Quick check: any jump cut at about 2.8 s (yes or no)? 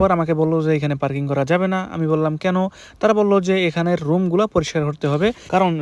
no